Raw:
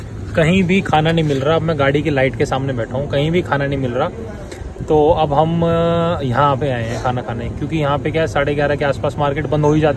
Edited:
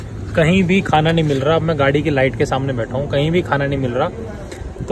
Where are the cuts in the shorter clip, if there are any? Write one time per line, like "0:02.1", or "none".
none